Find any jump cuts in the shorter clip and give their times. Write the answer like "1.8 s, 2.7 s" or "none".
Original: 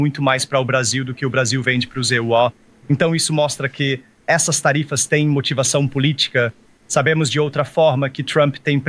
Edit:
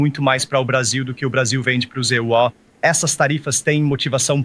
2.7 s

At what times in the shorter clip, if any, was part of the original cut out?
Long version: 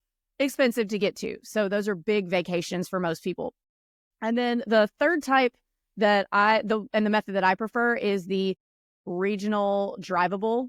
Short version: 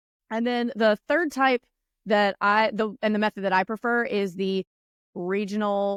none

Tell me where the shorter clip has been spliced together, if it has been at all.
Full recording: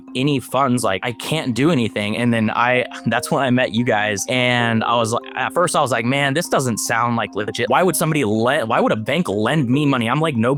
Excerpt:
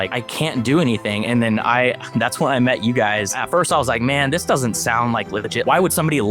3.3 s

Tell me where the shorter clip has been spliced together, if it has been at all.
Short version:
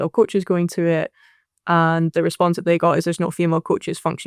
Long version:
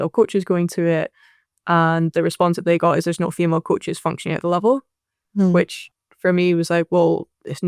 none

